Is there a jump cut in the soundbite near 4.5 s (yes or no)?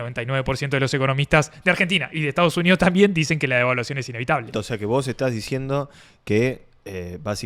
yes